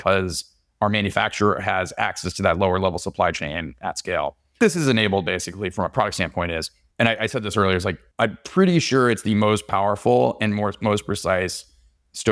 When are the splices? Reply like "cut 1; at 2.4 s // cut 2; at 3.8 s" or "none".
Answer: cut 1; at 6.8 s // cut 2; at 8.0 s